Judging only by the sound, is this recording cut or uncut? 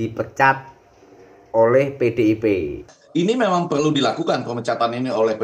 cut